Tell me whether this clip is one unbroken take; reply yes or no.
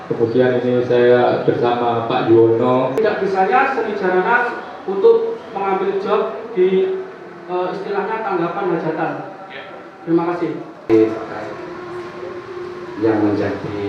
no